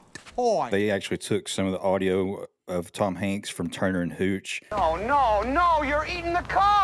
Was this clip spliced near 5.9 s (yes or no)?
no